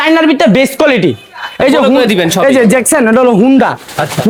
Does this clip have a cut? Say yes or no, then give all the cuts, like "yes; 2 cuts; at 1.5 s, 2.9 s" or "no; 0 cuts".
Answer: no; 0 cuts